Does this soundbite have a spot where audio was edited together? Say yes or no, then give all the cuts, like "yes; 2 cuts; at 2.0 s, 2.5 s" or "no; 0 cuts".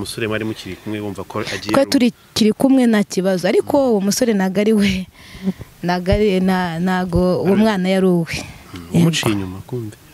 no; 0 cuts